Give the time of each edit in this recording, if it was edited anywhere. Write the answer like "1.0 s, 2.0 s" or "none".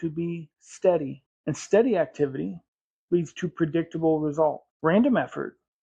1.3 s, 4.7 s